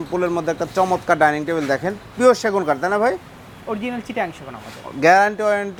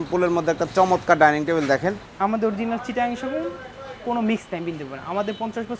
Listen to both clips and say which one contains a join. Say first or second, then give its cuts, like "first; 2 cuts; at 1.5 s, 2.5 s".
second; 1 cut; at 2.0 s